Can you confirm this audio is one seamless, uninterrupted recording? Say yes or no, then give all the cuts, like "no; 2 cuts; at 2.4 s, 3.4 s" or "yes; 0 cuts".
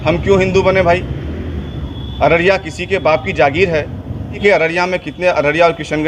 no; 1 cut; at 4.4 s